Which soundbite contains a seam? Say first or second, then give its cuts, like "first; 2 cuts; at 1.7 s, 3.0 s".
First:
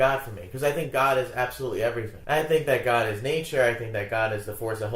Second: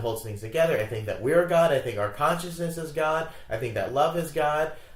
first; 1 cut; at 2.1 s